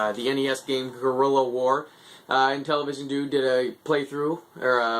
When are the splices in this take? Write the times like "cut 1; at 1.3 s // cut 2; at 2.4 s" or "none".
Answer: none